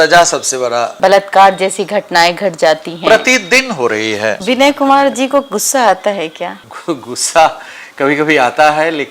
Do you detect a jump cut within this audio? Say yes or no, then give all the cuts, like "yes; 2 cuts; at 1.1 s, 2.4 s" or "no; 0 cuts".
yes; 3 cuts; at 0.9 s, 4.4 s, 6.7 s